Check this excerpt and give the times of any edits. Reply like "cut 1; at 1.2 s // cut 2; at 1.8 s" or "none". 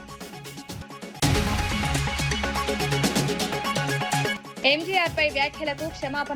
cut 1; at 1.2 s // cut 2; at 4.3 s